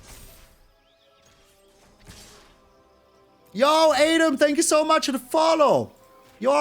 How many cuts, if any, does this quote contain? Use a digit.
1